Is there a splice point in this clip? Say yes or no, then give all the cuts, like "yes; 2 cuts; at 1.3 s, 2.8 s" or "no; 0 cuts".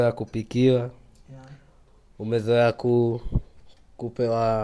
no; 0 cuts